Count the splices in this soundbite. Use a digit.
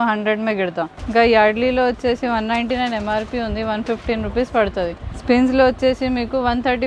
2